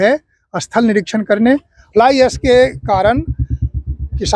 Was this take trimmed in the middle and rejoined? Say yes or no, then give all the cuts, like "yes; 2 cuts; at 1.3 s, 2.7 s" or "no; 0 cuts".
yes; 1 cut; at 1.8 s